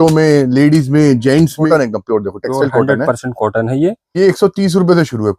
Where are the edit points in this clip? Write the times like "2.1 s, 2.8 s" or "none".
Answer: 1.7 s, 4.2 s